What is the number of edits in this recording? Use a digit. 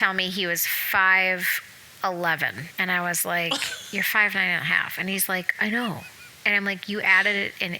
1